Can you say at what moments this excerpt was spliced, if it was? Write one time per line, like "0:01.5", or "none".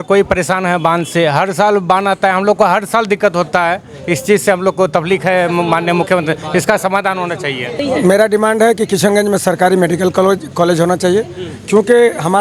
none